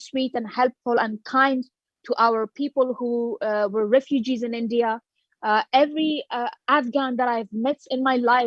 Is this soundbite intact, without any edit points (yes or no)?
yes